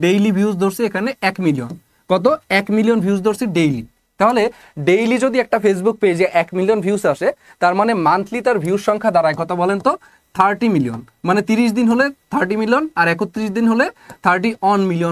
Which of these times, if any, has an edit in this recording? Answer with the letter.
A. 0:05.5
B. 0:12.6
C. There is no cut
C